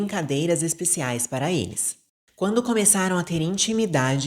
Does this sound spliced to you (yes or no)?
yes